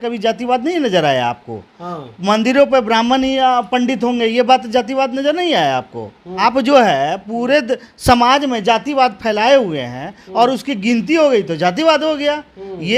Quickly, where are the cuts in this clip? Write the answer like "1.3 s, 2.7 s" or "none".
6.3 s